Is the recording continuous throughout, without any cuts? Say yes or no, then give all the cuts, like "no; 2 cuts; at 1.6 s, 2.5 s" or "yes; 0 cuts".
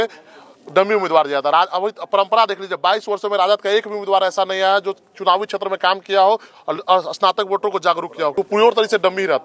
no; 1 cut; at 8.3 s